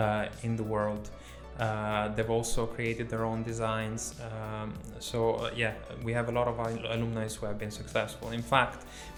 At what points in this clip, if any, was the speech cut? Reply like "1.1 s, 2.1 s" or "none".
none